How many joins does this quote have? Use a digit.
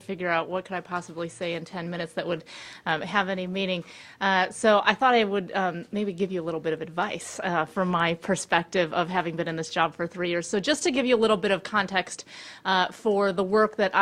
1